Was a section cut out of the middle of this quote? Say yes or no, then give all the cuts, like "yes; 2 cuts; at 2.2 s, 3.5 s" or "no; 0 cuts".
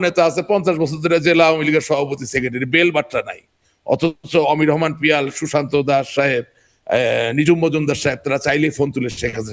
no; 0 cuts